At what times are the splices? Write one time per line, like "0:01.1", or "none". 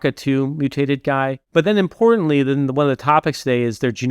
0:01.4